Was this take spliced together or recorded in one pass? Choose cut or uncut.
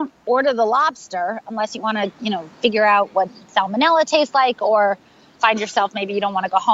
uncut